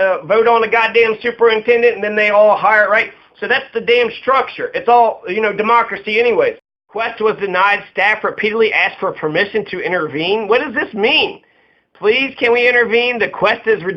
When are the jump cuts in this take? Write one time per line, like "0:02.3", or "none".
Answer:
0:06.7